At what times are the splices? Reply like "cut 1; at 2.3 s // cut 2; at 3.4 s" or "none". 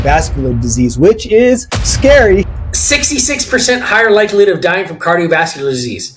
cut 1; at 2.5 s